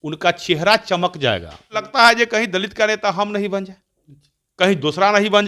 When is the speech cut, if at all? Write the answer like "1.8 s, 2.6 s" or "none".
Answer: 1.9 s